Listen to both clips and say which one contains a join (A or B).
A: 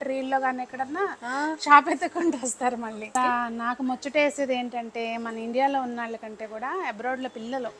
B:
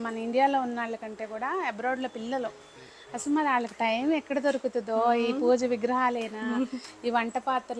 A